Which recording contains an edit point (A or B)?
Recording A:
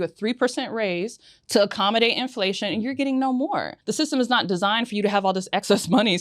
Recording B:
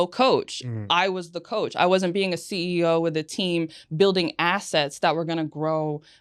A